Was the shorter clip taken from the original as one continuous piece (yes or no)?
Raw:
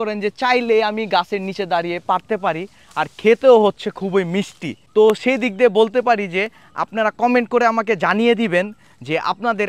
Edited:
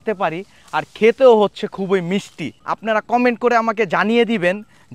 no